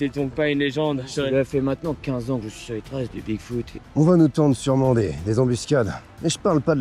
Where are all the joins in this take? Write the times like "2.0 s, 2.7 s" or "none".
3.8 s